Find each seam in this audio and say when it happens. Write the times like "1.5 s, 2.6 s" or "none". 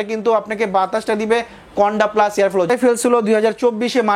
2.7 s